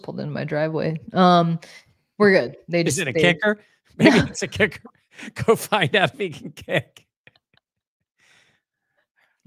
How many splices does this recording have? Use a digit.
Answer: 0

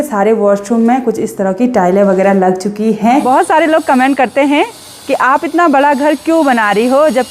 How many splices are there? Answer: 1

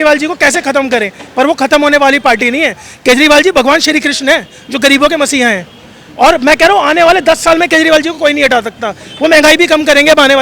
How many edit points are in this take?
0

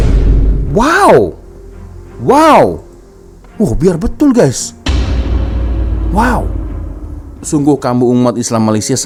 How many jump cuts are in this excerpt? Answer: 0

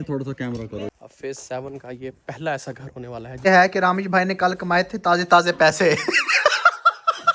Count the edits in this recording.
2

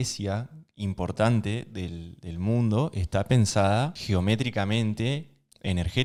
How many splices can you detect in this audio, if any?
0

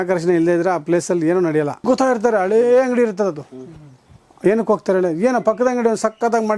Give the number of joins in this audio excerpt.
1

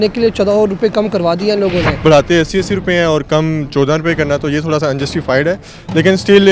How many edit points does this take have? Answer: 1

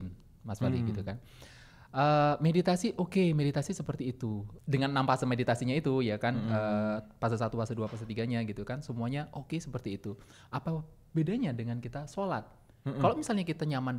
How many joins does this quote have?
1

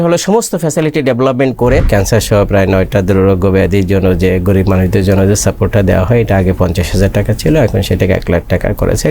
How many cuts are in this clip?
1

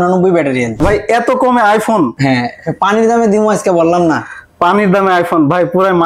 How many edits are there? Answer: 2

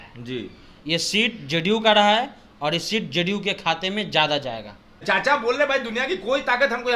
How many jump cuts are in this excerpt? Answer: 1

